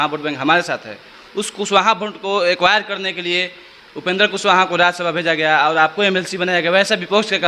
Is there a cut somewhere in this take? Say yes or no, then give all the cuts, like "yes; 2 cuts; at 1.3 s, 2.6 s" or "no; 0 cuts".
no; 0 cuts